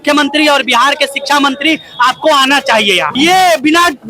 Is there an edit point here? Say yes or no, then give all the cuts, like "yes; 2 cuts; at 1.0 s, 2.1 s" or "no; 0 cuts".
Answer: yes; 1 cut; at 3.1 s